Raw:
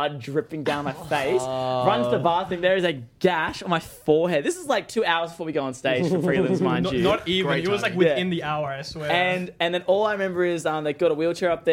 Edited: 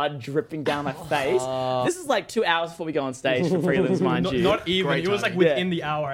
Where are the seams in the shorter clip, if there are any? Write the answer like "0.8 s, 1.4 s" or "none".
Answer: 1.8 s